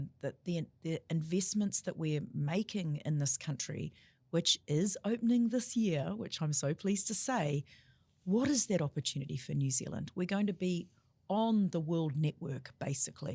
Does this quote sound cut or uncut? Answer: uncut